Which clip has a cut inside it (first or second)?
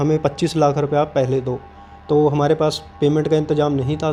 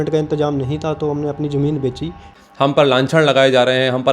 second